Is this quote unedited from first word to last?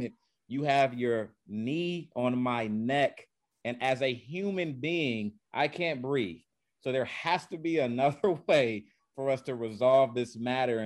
yes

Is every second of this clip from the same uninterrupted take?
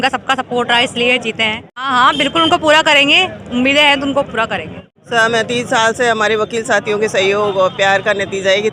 no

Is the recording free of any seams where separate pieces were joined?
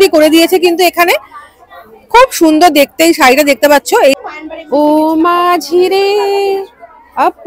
no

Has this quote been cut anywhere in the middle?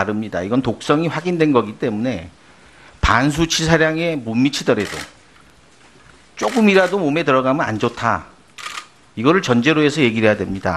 no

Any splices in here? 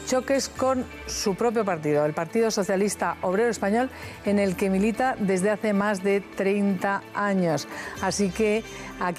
no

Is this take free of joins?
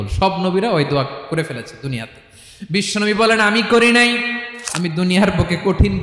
no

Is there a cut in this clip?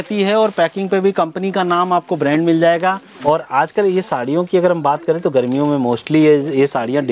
yes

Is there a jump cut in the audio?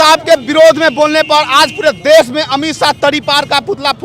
no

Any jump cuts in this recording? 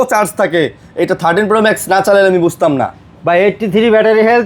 no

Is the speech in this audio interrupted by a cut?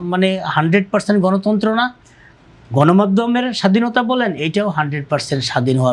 no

